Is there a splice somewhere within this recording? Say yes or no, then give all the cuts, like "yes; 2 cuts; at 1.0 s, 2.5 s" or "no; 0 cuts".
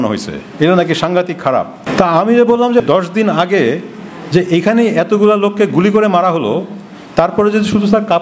yes; 2 cuts; at 1.8 s, 2.8 s